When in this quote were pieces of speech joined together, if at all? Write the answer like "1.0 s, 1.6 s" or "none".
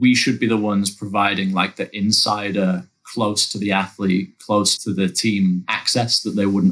none